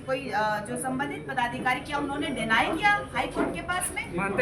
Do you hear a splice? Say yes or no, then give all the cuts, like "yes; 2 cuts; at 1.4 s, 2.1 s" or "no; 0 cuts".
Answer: no; 0 cuts